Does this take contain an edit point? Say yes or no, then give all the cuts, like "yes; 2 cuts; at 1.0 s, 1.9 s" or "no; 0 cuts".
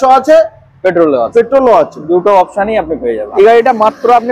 yes; 1 cut; at 3.2 s